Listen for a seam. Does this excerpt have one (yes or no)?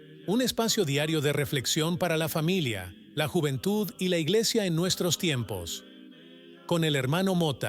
no